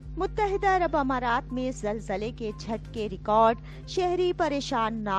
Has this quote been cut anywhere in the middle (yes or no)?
no